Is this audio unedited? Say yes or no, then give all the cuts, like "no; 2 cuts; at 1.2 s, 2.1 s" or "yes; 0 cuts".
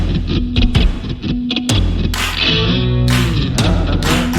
yes; 0 cuts